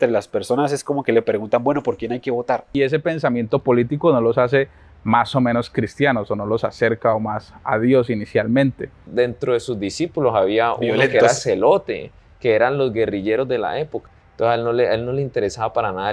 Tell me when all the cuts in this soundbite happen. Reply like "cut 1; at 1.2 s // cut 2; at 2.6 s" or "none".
cut 1; at 2.7 s // cut 2; at 9.1 s // cut 3; at 14.0 s